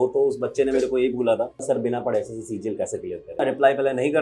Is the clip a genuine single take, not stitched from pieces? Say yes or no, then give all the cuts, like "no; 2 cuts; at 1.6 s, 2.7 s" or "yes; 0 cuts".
no; 2 cuts; at 1.6 s, 3.4 s